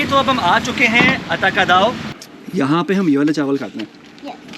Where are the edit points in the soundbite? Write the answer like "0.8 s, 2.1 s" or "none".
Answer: 2.1 s